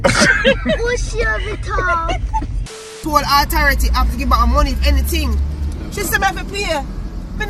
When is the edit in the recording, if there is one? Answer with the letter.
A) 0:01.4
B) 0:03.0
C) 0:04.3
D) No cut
B